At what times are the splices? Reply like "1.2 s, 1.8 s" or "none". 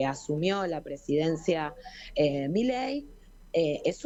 none